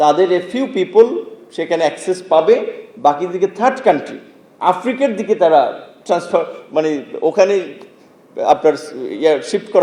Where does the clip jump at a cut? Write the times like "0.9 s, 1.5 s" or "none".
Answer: none